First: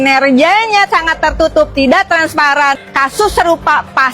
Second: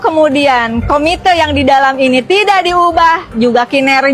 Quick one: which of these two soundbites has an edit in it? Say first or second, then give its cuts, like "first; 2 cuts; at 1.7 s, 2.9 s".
first; 1 cut; at 2.9 s